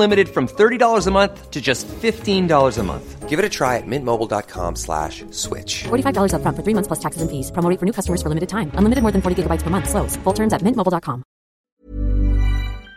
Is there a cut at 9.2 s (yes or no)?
no